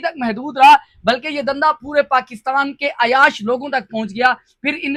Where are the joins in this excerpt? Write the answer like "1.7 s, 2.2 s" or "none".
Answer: none